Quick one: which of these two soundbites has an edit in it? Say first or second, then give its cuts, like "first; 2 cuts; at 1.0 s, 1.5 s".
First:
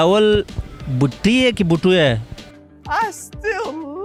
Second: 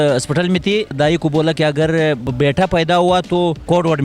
second; 2 cuts; at 0.9 s, 2.3 s